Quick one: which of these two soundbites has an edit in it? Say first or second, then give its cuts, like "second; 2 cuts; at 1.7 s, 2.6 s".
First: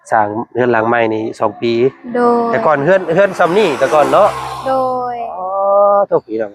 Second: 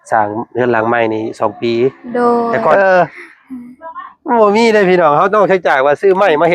second; 1 cut; at 2.7 s